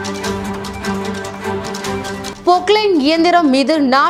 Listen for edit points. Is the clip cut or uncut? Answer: uncut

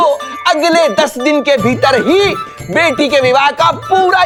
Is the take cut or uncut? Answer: uncut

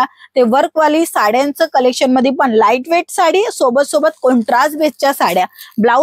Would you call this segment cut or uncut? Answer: uncut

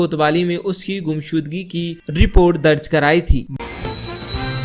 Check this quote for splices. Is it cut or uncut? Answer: cut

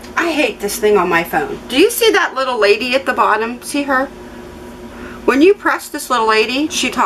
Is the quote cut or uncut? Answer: uncut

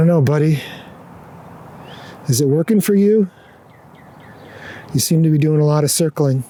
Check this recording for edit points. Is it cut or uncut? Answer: uncut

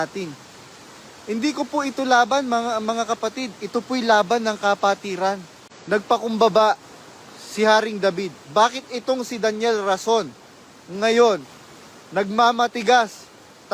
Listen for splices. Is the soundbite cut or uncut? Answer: cut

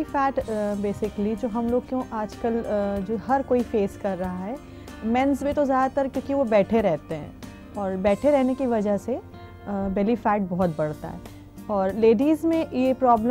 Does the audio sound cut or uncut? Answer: uncut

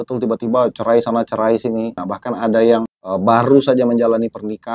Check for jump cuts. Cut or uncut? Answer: cut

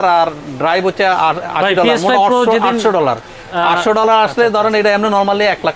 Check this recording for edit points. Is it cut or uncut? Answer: uncut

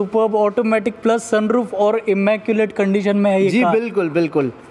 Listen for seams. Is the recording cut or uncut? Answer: uncut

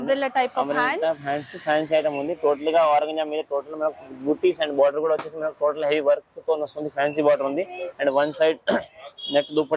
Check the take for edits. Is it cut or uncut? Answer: uncut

